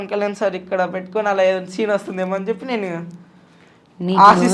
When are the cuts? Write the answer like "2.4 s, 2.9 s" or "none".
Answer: none